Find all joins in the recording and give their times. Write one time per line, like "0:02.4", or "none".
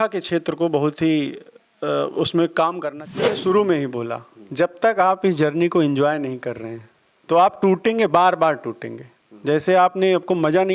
0:03.1